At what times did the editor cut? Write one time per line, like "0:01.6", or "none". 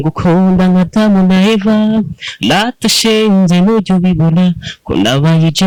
none